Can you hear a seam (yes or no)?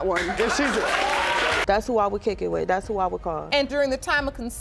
yes